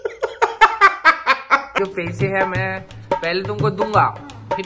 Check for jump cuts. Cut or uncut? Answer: cut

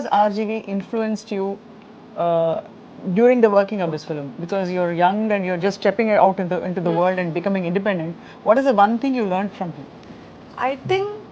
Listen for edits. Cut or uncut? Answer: uncut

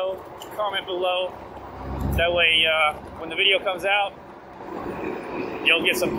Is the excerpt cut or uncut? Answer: uncut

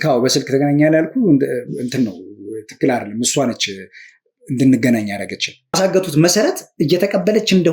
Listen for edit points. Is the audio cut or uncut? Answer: cut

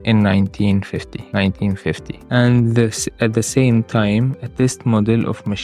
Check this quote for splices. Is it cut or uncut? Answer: cut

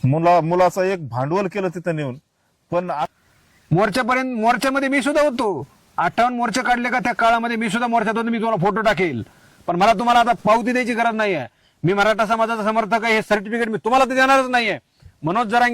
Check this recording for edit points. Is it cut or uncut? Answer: cut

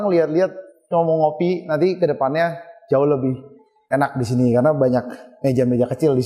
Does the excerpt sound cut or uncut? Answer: uncut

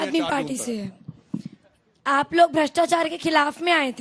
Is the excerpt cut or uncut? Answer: uncut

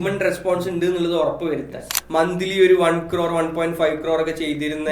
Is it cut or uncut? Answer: cut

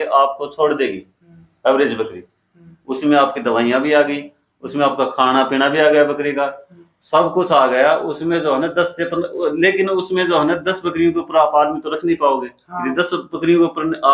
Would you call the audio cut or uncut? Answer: uncut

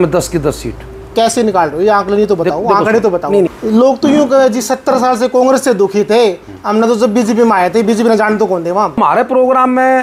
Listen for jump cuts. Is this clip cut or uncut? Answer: cut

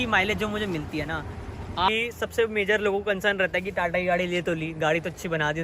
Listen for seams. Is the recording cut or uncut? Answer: cut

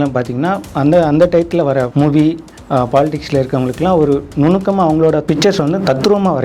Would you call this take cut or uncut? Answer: cut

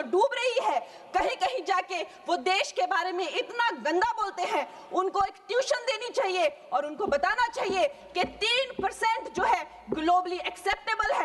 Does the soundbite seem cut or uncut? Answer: uncut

